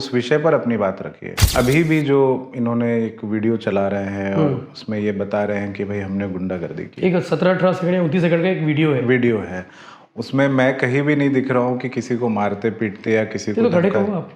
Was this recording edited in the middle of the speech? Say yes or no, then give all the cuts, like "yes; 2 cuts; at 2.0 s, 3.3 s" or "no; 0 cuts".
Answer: yes; 1 cut; at 1.4 s